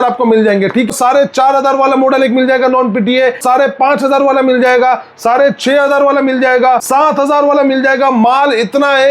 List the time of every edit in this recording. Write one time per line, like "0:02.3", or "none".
0:00.9
0:03.4
0:06.8